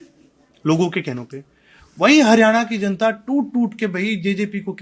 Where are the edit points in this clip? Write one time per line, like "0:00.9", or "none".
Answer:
none